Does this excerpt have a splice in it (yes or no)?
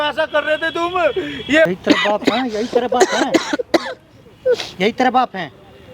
yes